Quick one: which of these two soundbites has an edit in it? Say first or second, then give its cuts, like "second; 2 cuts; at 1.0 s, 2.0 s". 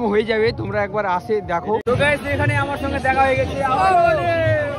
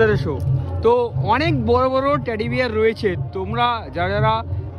first; 1 cut; at 1.8 s